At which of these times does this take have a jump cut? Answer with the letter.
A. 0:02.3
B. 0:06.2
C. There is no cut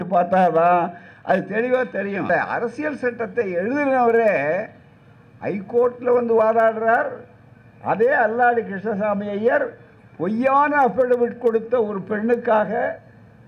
A